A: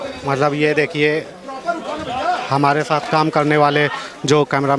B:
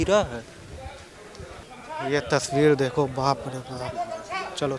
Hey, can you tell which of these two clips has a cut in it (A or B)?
B